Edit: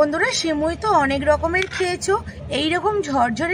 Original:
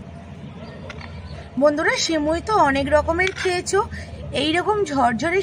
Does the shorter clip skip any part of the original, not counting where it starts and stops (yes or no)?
yes